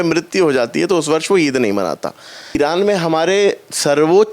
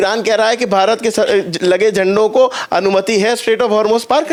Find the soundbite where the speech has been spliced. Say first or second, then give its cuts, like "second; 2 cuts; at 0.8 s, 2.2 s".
first; 1 cut; at 2.6 s